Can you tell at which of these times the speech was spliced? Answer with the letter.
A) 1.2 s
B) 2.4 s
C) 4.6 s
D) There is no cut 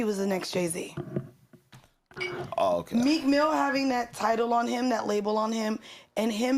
A